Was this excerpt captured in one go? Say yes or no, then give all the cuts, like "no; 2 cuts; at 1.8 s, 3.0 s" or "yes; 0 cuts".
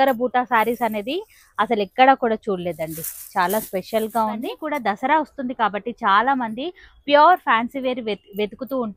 no; 1 cut; at 4.6 s